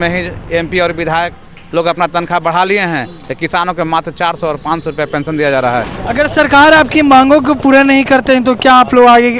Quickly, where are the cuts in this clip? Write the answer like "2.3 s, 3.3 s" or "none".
5.9 s